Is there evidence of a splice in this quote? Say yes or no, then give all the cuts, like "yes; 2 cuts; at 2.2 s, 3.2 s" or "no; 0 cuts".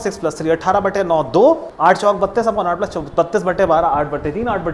yes; 1 cut; at 1.7 s